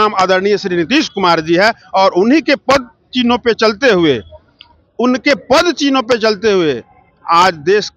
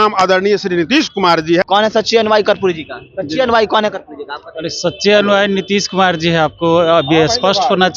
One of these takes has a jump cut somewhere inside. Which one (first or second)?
second